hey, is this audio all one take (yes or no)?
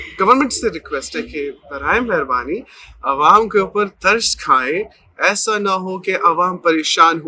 yes